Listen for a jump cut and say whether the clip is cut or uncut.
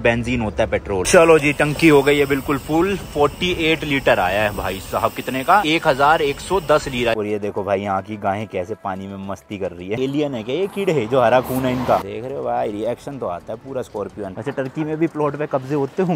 cut